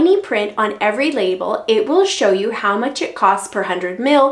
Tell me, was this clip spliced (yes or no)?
no